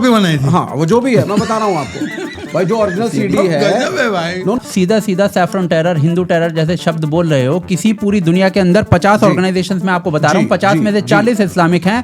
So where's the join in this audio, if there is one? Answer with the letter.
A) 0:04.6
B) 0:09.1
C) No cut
A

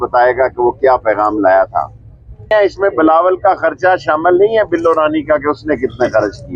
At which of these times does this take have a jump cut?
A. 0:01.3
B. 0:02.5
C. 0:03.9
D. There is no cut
B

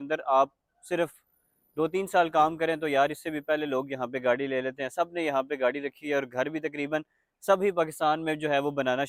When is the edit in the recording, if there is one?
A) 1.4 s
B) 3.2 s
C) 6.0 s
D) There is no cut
D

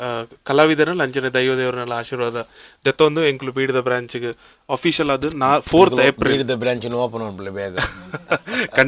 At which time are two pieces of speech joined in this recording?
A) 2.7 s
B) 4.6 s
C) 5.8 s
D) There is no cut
D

